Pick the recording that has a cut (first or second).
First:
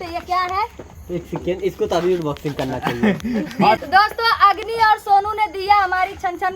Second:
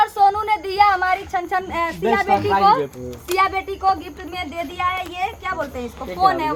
first